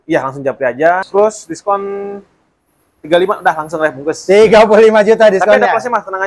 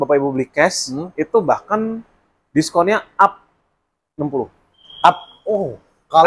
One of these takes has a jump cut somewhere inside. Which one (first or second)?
first